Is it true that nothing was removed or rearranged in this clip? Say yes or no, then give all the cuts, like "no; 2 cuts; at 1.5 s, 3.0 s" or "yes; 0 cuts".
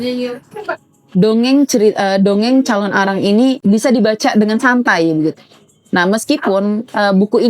no; 1 cut; at 3.6 s